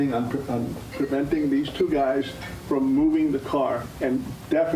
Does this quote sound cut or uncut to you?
uncut